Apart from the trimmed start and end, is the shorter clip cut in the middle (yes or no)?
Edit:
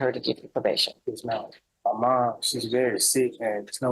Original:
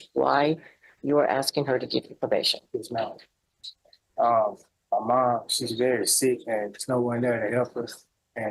yes